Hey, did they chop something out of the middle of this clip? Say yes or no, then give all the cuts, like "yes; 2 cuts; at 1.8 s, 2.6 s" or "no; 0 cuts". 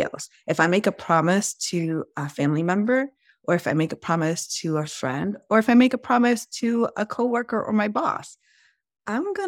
no; 0 cuts